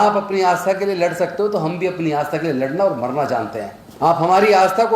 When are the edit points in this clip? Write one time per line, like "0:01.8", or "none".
0:03.8